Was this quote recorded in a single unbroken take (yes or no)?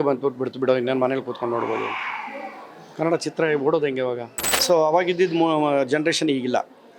no